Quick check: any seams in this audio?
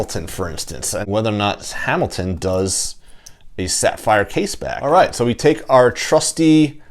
yes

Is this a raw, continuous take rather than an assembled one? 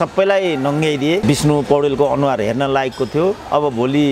no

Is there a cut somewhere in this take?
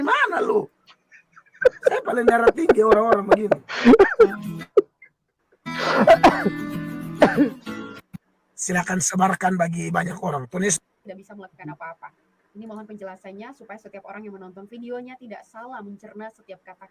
no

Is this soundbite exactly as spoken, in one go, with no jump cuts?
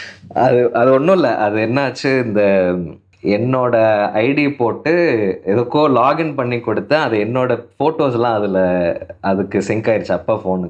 no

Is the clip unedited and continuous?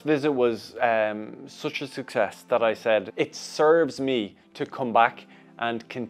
no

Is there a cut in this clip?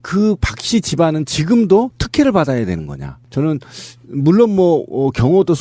yes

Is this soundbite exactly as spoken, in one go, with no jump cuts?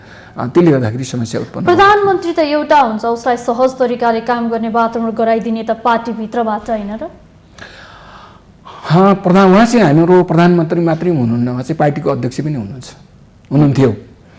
yes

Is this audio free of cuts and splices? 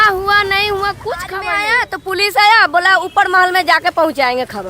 no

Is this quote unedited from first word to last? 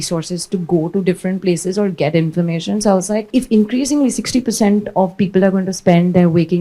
no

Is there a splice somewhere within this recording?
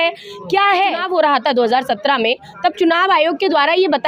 yes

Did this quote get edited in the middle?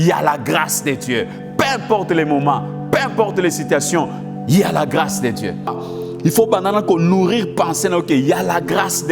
yes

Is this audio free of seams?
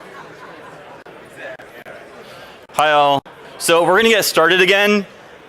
no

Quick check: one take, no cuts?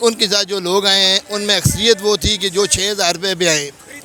yes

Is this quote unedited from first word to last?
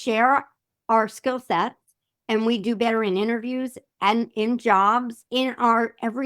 no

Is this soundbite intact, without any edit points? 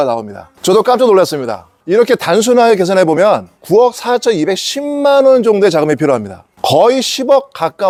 yes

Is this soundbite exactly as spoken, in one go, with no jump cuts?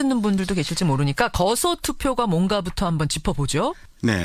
no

